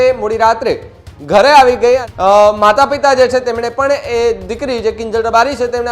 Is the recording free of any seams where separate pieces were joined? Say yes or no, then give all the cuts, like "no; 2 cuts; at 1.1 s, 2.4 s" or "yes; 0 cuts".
no; 1 cut; at 2.1 s